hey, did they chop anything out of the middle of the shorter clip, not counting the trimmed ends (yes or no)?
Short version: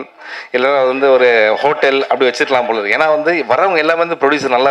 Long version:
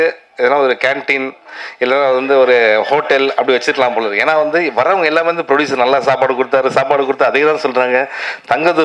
no